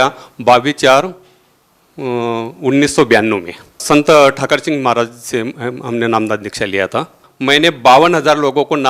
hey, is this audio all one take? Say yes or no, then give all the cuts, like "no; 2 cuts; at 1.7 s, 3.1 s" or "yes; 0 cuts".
no; 2 cuts; at 3.8 s, 7.2 s